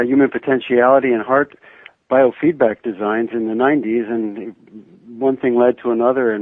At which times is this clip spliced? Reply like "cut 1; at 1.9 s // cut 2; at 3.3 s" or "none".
cut 1; at 1.6 s